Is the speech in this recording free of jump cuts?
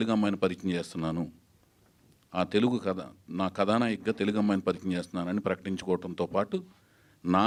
yes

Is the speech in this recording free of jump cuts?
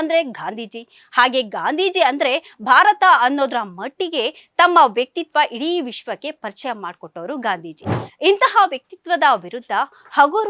yes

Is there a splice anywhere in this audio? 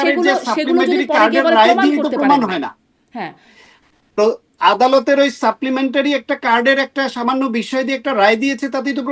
no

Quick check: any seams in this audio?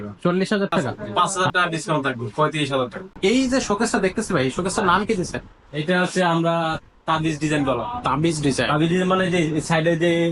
yes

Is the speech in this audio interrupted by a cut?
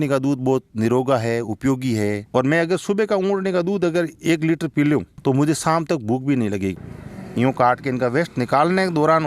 yes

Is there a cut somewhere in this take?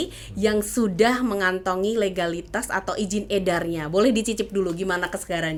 no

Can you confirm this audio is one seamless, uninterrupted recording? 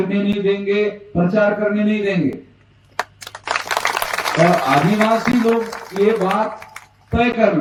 yes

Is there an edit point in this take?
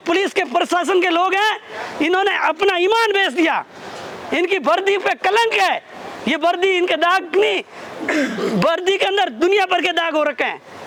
no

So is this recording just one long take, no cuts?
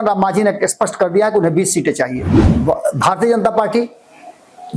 no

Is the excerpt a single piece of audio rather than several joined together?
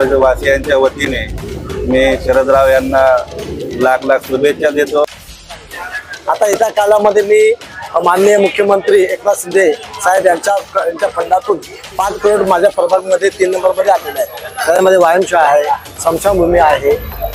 no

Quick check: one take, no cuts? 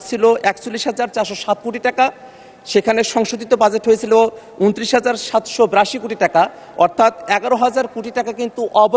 yes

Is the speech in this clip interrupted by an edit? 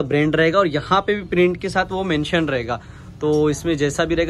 no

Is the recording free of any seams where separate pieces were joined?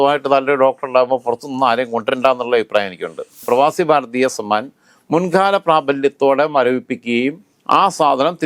no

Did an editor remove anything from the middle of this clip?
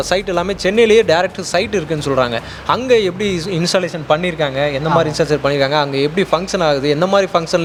no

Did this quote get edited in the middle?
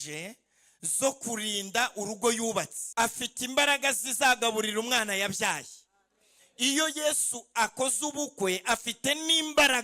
yes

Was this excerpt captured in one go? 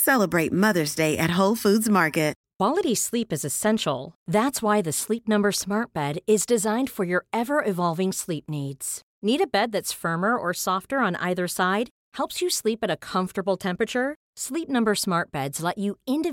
no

